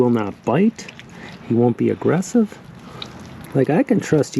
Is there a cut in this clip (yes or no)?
yes